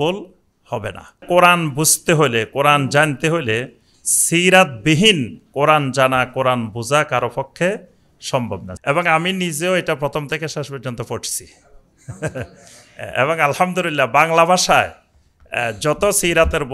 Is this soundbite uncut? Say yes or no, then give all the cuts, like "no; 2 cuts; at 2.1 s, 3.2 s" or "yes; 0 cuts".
no; 2 cuts; at 1.2 s, 8.7 s